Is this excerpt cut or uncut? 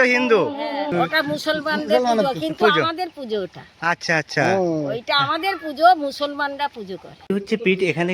cut